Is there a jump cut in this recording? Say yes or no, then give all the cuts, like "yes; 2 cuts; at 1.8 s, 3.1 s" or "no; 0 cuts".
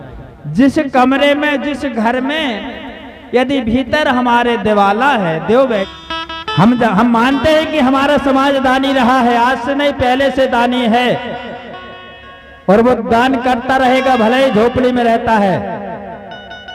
yes; 1 cut; at 5.9 s